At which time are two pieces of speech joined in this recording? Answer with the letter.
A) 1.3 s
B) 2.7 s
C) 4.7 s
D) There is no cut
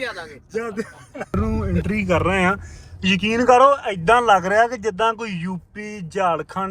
A